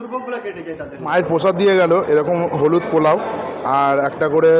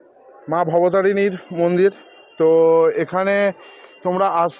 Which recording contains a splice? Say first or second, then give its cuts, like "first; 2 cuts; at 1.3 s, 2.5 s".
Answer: first; 1 cut; at 0.9 s